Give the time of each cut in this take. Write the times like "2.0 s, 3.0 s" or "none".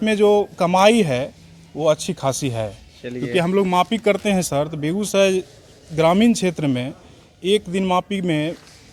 none